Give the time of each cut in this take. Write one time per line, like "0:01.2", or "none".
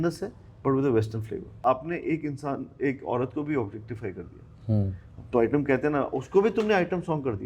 0:01.4